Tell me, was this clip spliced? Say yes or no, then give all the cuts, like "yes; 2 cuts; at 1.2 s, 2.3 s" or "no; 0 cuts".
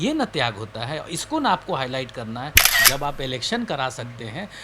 yes; 1 cut; at 2.7 s